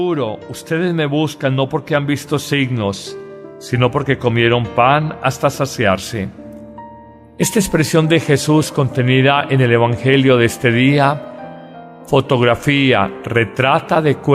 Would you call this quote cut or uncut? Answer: cut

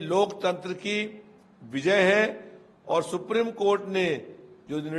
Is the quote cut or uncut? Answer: uncut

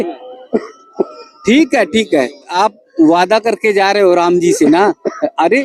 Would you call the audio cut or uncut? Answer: cut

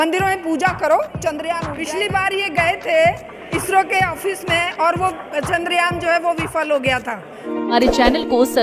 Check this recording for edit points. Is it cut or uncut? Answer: cut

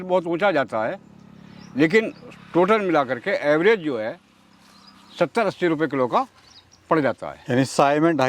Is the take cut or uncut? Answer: uncut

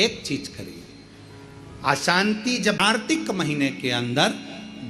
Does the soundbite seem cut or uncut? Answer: cut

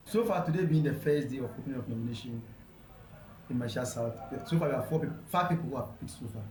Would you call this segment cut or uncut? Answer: uncut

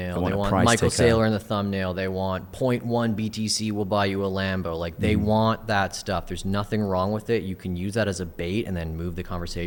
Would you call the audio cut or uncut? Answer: uncut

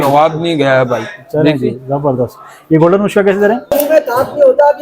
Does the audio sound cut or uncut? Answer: cut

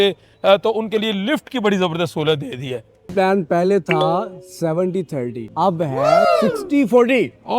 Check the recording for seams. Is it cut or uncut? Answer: cut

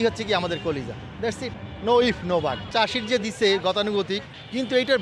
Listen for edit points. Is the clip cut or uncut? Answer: cut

